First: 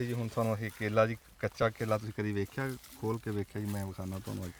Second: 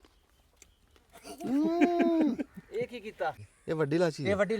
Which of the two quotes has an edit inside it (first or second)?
second